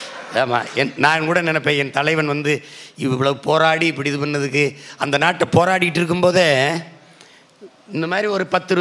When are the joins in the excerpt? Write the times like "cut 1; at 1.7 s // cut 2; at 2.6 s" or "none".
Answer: none